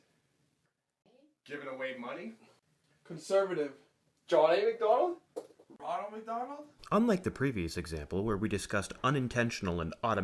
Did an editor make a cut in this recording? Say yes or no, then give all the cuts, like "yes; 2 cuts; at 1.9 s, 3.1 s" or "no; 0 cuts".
no; 0 cuts